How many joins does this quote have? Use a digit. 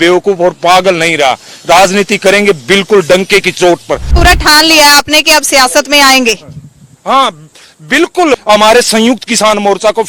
2